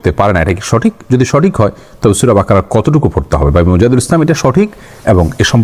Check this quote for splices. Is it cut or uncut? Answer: uncut